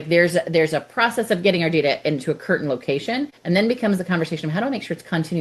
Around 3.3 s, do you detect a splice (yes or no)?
yes